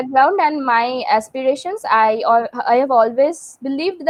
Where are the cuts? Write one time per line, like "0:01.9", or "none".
none